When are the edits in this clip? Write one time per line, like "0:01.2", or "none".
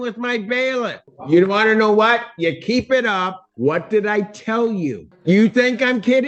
0:01.1
0:03.4
0:05.1